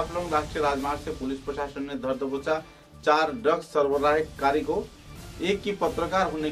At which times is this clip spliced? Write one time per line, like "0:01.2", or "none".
none